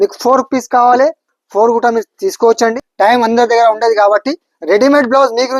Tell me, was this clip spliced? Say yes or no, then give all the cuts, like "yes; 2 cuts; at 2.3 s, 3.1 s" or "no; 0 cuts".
yes; 1 cut; at 2.8 s